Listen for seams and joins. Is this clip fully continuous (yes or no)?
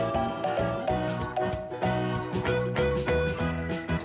yes